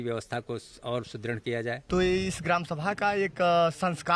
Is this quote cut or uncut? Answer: cut